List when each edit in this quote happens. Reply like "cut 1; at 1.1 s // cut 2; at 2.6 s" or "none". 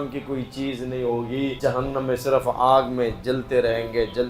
cut 1; at 1.6 s